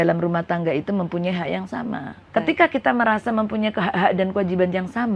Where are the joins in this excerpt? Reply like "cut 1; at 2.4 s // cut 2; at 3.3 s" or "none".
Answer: cut 1; at 2.2 s